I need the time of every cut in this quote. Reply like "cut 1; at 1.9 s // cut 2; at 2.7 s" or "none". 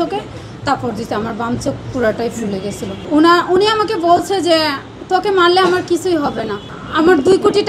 cut 1; at 3.0 s